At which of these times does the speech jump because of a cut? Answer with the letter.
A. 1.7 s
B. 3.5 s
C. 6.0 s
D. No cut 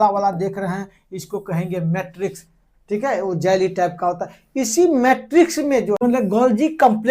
C